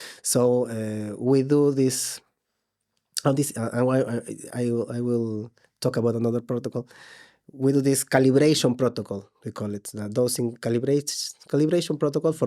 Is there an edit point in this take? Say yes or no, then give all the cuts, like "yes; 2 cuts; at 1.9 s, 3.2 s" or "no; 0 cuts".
no; 0 cuts